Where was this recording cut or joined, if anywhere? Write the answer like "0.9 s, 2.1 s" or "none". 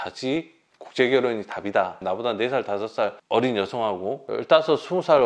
1.9 s